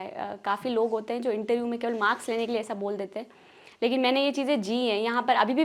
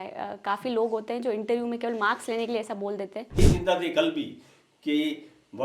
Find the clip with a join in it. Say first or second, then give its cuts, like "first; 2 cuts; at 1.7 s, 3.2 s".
second; 1 cut; at 3.4 s